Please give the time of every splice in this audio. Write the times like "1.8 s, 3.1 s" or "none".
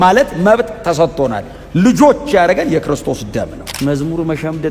3.6 s